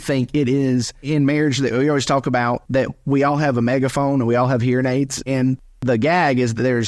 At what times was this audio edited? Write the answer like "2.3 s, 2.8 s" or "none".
1.1 s, 2.6 s, 5.2 s